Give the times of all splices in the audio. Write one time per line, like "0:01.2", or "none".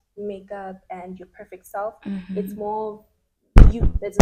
none